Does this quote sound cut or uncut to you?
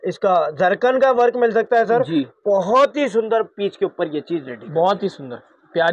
uncut